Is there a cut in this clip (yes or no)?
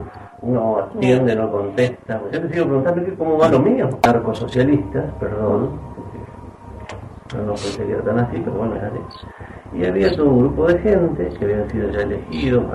yes